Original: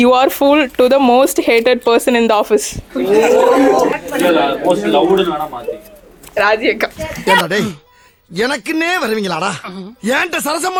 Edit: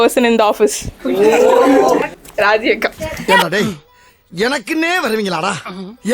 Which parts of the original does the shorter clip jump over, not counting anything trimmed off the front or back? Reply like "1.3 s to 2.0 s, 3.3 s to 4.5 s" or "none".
4.0 s to 6.1 s